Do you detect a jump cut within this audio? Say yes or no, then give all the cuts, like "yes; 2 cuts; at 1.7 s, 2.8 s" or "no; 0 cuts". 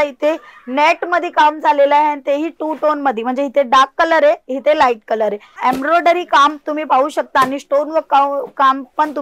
yes; 1 cut; at 5.6 s